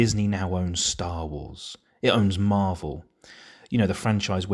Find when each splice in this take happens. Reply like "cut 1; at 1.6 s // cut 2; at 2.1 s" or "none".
none